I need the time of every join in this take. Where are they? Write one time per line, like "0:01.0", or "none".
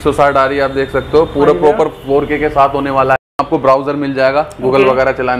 0:03.2